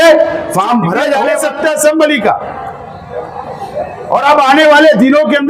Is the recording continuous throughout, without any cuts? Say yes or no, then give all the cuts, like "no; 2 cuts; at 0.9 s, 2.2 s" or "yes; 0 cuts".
no; 1 cut; at 1.1 s